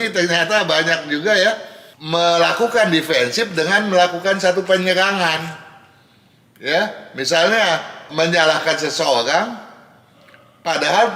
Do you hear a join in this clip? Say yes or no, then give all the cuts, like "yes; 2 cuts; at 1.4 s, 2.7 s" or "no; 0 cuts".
no; 0 cuts